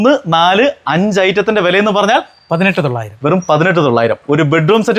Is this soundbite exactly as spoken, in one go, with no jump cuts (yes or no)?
yes